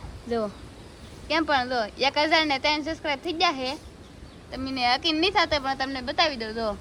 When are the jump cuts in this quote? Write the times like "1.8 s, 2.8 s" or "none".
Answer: none